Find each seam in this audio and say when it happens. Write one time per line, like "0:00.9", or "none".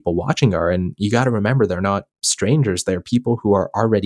none